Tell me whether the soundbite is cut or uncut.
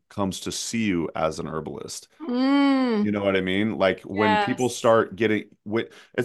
uncut